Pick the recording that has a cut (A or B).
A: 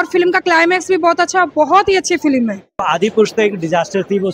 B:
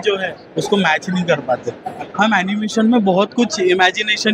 A